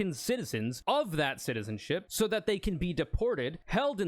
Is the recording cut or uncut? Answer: cut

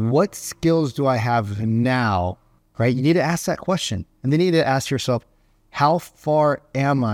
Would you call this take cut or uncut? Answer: uncut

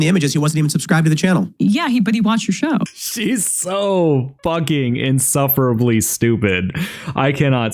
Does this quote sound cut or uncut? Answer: cut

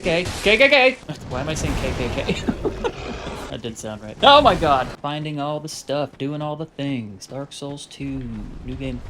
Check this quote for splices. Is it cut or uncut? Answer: cut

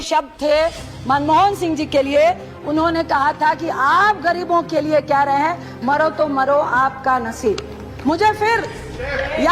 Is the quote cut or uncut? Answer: uncut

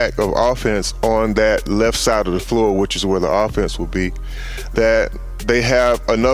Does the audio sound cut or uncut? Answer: uncut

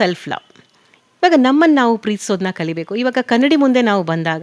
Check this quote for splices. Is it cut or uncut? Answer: uncut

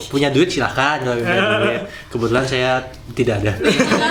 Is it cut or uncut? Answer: uncut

